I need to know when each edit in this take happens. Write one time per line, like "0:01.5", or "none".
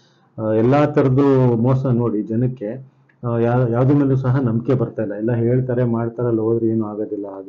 none

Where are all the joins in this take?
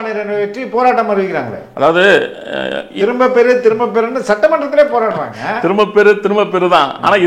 none

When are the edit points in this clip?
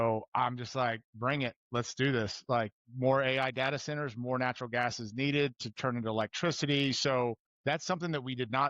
0:07.5

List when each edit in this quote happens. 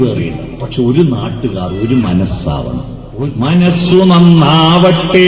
0:03.3

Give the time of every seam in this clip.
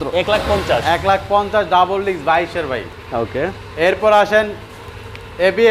none

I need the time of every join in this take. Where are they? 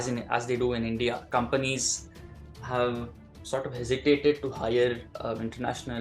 0:01.2

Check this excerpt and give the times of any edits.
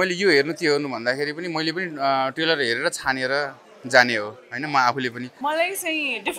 0:05.3

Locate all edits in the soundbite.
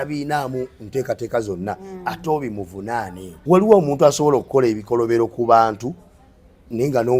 0:03.2

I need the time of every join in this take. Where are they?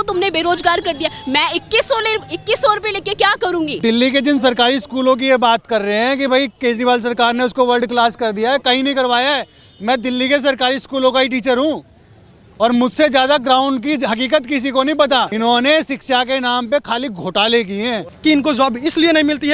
0:03.8
0:15.3
0:18.1

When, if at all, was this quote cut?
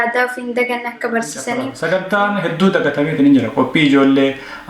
0:01.8

